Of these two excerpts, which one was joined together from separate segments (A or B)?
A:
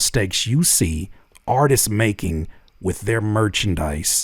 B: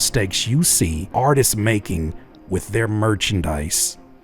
B